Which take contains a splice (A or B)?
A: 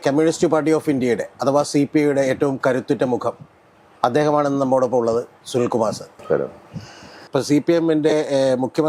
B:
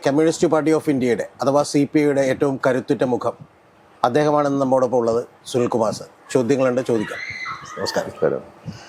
A